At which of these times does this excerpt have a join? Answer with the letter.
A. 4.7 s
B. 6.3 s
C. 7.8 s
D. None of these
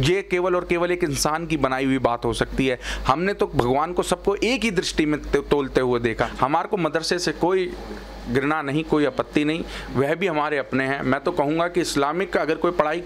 B